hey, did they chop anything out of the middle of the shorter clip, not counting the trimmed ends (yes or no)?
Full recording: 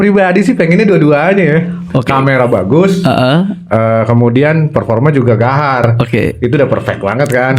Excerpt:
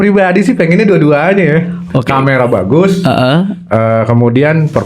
no